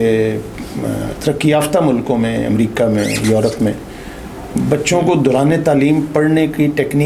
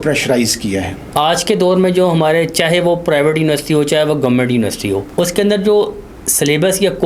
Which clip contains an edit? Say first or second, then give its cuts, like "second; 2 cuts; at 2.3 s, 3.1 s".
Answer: second; 2 cuts; at 1.0 s, 5.1 s